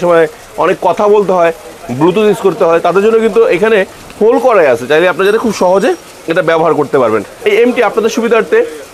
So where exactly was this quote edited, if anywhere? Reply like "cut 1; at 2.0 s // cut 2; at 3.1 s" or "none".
none